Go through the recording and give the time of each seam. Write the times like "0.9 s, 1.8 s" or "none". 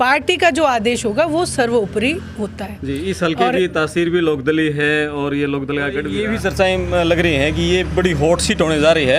6.1 s